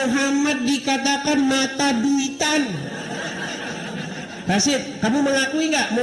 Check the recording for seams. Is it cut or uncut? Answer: uncut